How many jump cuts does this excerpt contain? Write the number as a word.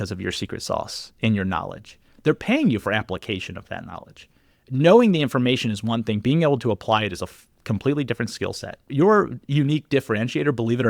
one